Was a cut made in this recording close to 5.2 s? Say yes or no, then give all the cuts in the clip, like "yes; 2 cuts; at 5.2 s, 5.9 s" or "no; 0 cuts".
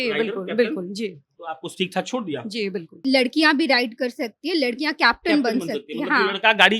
no; 1 cut; at 3.0 s